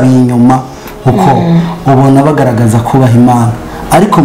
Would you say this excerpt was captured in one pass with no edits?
yes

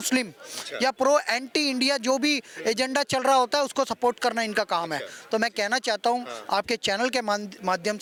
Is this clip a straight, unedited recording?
yes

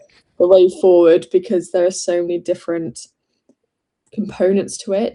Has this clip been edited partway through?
no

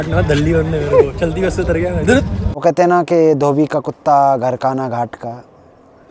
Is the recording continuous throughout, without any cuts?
no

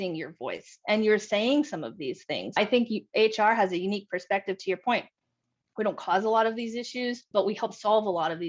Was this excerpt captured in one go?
yes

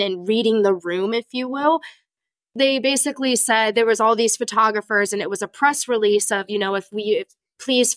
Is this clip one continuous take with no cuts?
no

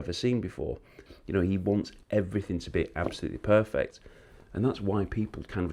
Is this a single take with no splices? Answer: no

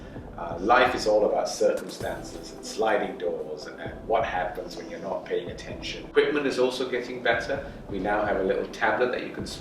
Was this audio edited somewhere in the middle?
yes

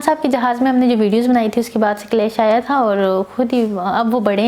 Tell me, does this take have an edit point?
no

